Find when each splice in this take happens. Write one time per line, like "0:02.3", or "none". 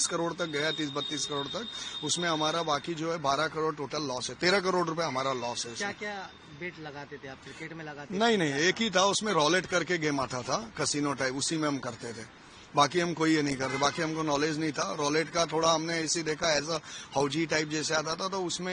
none